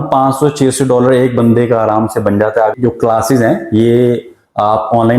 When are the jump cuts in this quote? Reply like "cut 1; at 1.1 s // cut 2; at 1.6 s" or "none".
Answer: cut 1; at 2.7 s